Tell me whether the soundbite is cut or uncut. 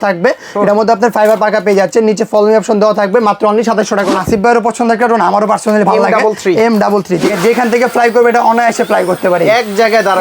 cut